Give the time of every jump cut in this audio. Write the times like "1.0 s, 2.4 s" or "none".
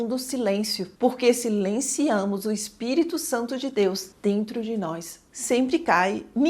5.2 s